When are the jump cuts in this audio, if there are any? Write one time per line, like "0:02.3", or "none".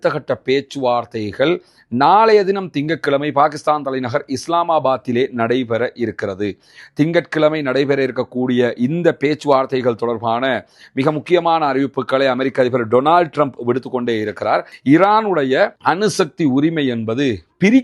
0:14.7